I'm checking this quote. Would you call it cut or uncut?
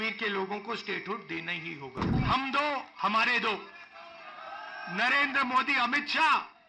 cut